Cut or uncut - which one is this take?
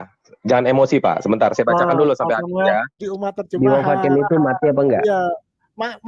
cut